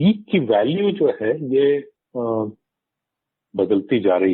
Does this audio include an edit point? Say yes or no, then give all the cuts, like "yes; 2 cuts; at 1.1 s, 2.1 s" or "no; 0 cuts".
no; 0 cuts